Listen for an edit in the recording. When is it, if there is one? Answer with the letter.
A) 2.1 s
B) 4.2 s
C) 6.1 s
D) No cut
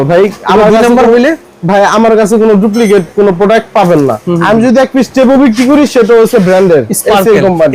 B